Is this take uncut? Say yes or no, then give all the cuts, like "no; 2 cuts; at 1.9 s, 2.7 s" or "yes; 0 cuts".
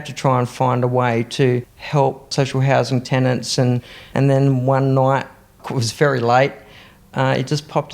no; 2 cuts; at 1.8 s, 5.7 s